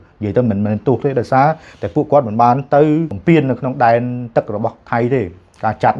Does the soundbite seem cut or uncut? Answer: cut